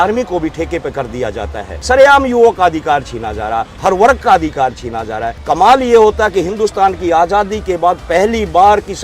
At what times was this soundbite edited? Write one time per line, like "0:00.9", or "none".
0:01.7
0:05.3